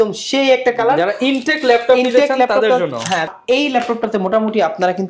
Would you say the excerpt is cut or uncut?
cut